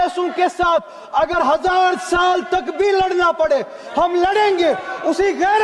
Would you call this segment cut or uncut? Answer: uncut